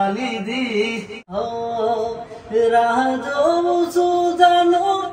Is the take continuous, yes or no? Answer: no